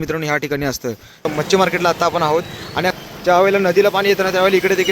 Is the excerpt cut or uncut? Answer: cut